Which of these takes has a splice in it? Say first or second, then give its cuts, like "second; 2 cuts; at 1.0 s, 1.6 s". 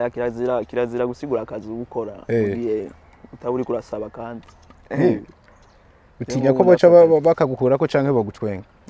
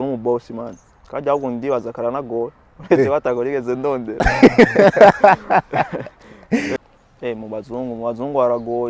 second; 1 cut; at 6.8 s